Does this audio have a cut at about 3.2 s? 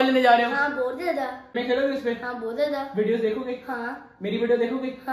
no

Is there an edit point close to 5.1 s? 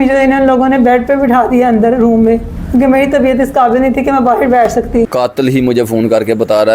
yes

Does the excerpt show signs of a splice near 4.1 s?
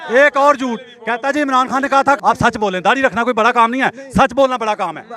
no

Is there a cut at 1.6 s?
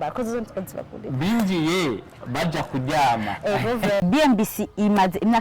no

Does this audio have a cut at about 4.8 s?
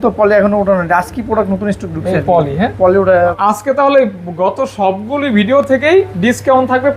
no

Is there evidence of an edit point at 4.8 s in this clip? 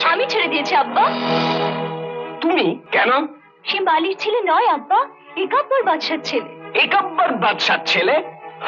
no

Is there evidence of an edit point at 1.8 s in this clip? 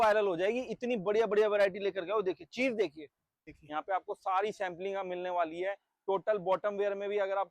no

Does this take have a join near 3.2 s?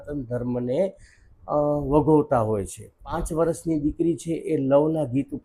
yes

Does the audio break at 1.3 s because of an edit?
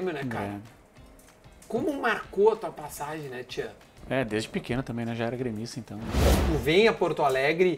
no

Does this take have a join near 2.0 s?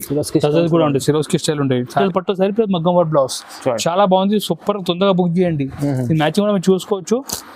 yes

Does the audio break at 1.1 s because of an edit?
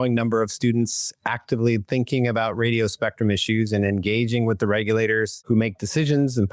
no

